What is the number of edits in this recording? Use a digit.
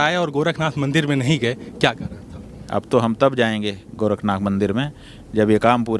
2